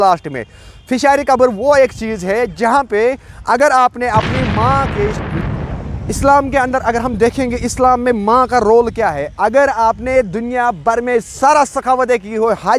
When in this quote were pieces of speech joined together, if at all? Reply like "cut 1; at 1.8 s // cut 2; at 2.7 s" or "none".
cut 1; at 5.3 s